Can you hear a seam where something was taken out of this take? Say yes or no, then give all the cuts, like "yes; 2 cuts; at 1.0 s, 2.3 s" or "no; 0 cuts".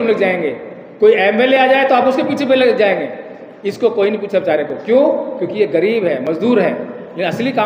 no; 0 cuts